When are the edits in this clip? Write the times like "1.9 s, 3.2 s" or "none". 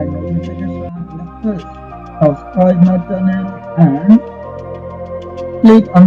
none